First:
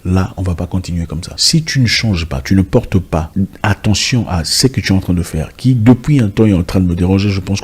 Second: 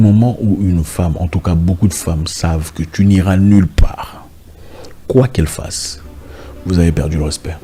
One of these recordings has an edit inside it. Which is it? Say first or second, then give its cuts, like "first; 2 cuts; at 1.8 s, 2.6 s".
first; 2 cuts; at 1.3 s, 3.3 s